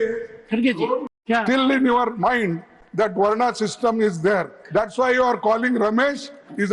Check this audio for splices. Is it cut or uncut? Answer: cut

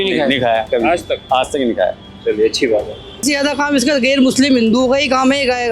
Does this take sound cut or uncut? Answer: cut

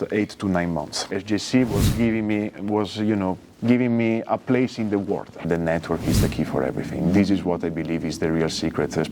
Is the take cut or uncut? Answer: cut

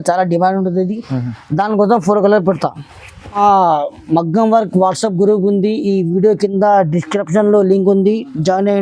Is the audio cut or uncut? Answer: cut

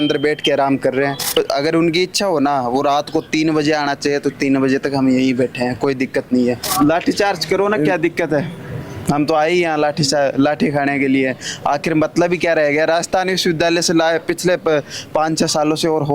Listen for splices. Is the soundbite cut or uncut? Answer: cut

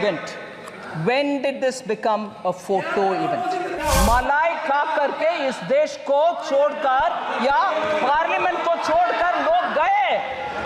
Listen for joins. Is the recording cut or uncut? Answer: cut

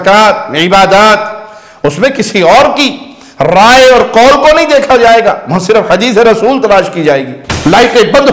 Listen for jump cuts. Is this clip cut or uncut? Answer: cut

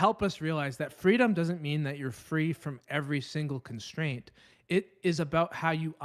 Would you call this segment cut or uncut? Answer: uncut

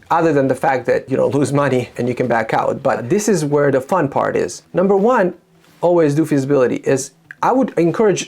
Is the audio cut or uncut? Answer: cut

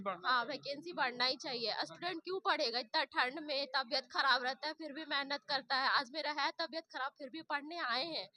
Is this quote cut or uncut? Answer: uncut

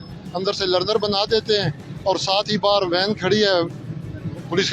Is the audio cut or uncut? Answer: uncut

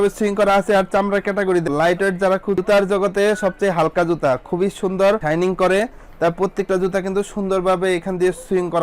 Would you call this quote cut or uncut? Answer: cut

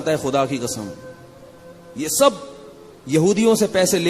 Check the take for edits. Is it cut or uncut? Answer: uncut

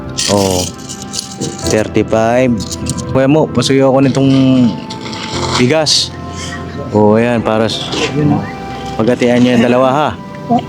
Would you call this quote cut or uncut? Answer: cut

